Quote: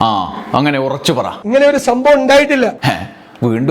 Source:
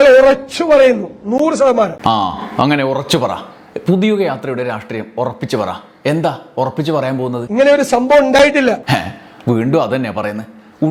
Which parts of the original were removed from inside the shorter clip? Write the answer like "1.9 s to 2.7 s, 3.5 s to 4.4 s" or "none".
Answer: 3.4 s to 7.4 s